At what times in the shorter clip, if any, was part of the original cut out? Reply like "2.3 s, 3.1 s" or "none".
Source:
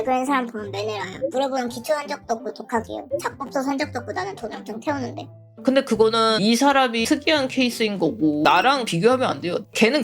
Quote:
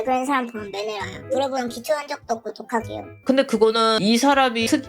3.0 s